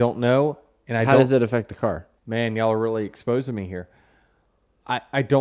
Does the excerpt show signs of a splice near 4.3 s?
no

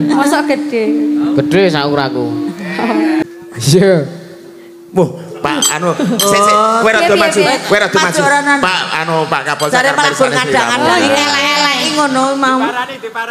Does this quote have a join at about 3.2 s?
yes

